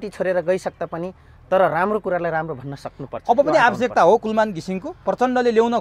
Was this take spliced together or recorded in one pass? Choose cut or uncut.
uncut